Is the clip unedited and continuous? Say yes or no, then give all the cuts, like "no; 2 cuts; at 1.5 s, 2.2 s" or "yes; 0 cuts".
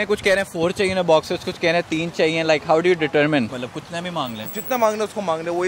yes; 0 cuts